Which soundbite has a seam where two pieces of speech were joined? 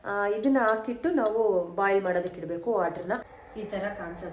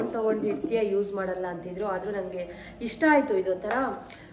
first; 1 cut; at 3.4 s

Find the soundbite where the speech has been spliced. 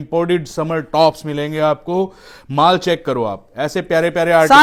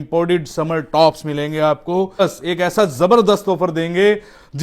second; 1 cut; at 2.2 s

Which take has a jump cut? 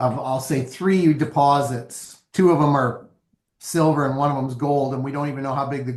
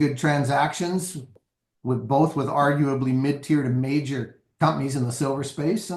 second; 1 cut; at 1.3 s

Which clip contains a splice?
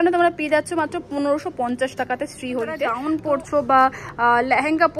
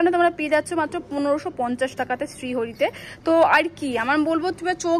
first; 1 cut; at 3.0 s

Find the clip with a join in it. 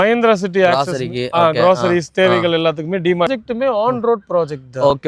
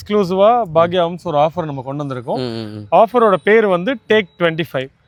first; 1 cut; at 3.3 s

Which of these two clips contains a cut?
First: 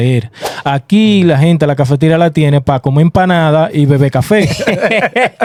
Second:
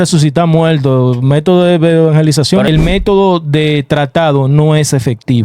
second; 1 cut; at 2.7 s

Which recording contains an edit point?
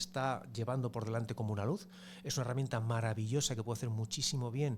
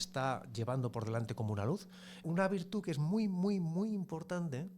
second; 1 cut; at 2.2 s

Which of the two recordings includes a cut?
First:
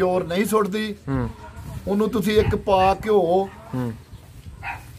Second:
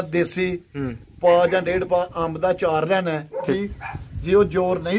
second; 1 cut; at 3.5 s

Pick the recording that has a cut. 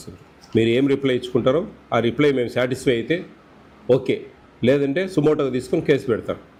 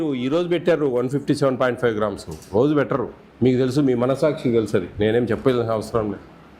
second; 1 cut; at 3.2 s

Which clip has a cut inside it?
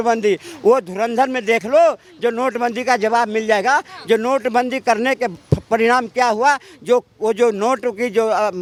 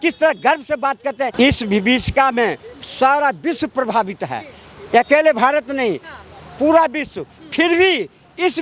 second; 1 cut; at 1.3 s

